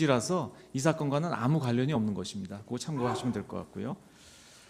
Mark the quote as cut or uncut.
cut